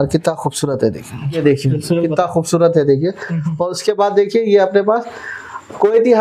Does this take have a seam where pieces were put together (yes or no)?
yes